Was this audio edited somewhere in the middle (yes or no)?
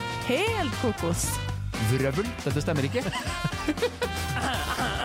no